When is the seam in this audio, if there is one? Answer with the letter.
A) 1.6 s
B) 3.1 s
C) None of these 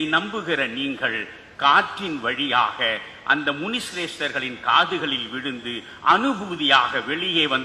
C